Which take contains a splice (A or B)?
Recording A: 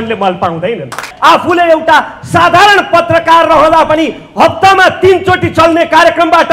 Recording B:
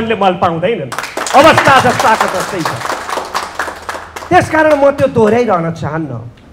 A